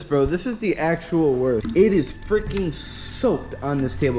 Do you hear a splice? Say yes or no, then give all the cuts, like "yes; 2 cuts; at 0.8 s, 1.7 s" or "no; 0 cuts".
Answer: yes; 1 cut; at 1.6 s